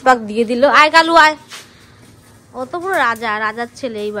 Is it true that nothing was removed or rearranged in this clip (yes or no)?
yes